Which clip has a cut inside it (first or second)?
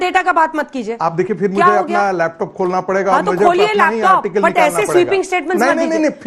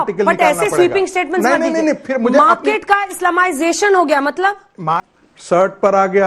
second